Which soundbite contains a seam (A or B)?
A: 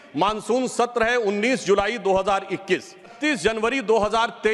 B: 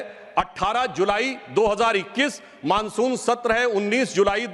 A